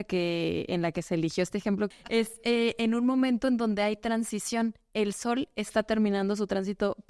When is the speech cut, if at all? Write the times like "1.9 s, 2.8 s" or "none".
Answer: 1.9 s